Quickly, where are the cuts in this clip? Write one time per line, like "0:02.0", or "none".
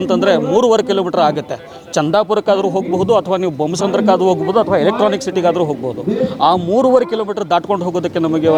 none